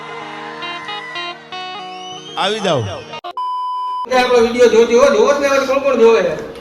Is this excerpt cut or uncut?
cut